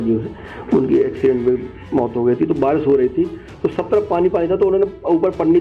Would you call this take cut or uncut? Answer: uncut